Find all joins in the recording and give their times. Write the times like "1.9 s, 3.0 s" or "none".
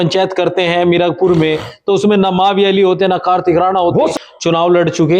4.1 s